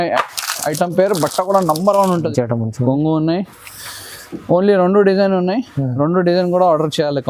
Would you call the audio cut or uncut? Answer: cut